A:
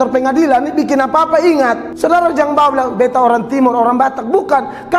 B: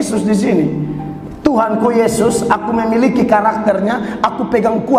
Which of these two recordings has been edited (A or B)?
A